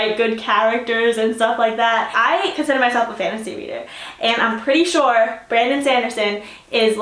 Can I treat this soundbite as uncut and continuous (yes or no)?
yes